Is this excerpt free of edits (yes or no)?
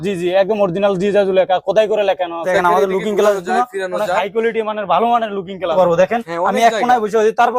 no